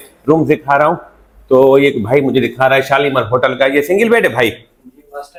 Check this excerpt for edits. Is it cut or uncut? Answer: uncut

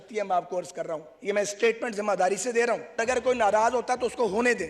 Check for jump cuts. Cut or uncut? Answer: cut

